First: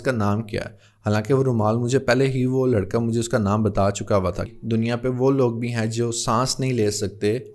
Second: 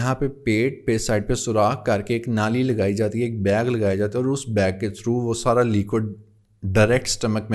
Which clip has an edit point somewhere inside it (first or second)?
first